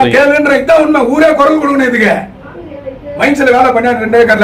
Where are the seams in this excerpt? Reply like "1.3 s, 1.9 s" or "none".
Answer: none

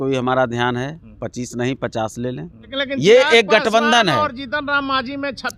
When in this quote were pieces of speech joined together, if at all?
2.7 s

